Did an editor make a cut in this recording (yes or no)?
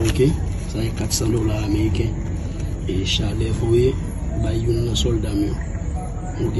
no